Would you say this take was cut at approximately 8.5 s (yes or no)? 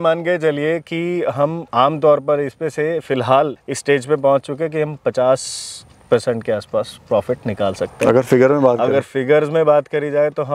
no